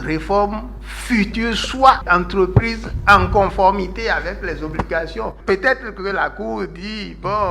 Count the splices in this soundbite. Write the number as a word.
two